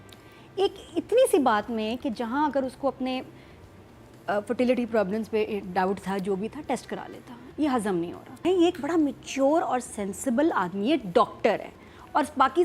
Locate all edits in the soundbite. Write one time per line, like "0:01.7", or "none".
0:08.4